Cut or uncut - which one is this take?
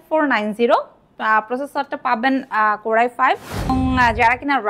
cut